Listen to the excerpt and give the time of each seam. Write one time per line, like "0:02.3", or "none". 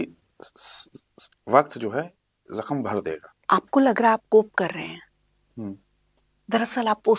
0:03.3